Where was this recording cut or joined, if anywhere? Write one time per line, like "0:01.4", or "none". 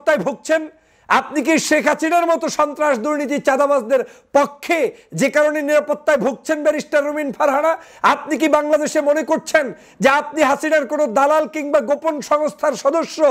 none